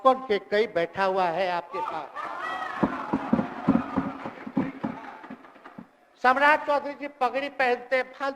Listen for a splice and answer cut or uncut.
uncut